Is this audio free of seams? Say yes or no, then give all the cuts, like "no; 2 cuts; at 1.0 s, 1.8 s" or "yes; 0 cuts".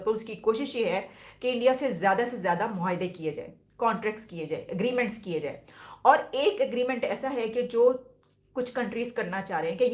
yes; 0 cuts